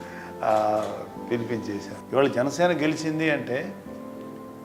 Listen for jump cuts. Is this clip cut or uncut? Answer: uncut